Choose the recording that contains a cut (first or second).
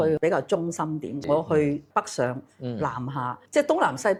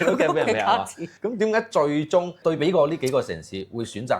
second